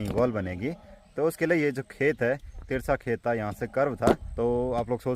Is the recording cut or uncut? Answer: cut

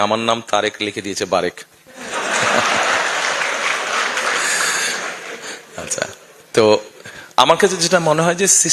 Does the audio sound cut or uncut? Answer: uncut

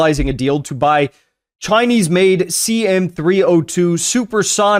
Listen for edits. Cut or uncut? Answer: uncut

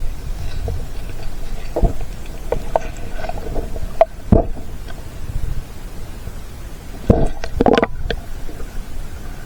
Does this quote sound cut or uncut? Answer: uncut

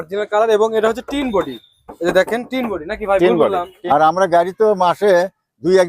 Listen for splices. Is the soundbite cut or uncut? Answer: cut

